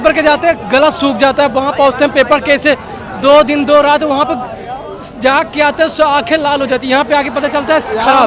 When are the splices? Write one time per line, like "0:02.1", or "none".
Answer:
none